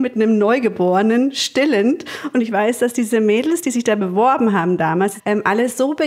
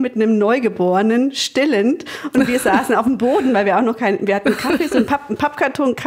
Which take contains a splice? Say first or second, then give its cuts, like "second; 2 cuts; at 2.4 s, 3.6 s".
first; 2 cuts; at 2.4 s, 5.2 s